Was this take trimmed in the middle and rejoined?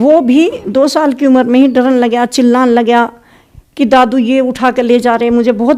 no; 0 cuts

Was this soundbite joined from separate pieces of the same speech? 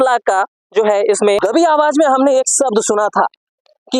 yes; 1 cut; at 1.4 s

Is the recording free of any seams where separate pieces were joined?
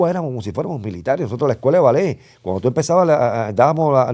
yes; 0 cuts

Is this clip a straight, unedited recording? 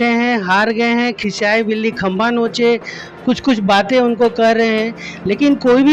yes; 0 cuts

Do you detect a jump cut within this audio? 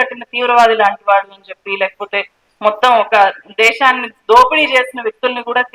no; 0 cuts

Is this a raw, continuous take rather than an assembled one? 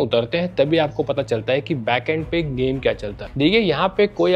no; 1 cut; at 3.2 s

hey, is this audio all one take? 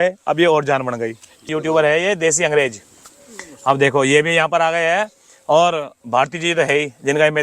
no; 1 cut; at 1.5 s

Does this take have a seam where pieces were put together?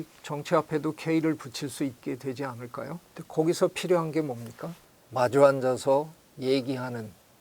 yes; 1 cut; at 2.0 s

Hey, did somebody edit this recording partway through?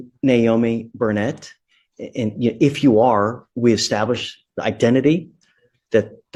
no; 0 cuts

